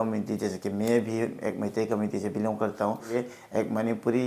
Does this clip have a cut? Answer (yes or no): yes